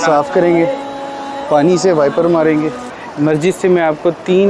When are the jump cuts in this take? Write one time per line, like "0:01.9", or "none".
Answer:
0:03.0